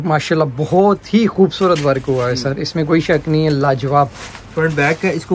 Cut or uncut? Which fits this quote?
uncut